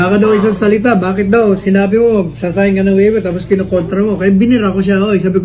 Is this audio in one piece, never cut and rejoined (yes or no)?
yes